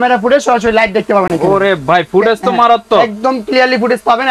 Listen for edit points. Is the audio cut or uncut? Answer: uncut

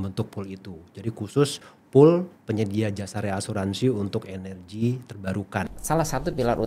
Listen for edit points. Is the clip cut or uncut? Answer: cut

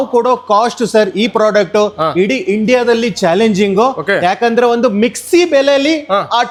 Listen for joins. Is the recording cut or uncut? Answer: uncut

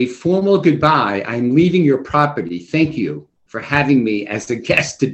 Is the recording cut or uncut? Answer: uncut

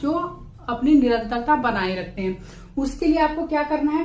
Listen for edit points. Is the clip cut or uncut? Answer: uncut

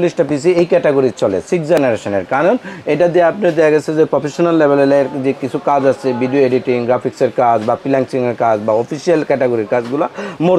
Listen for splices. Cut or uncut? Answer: uncut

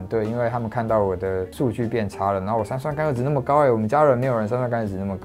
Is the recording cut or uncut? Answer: uncut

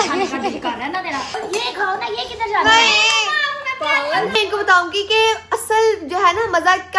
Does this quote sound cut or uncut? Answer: cut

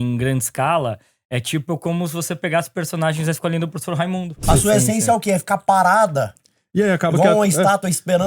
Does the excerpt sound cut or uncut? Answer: cut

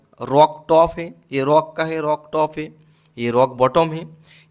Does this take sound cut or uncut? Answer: uncut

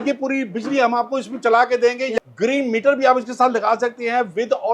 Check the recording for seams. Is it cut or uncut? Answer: cut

